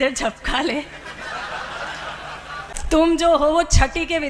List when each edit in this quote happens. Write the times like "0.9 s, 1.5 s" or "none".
2.8 s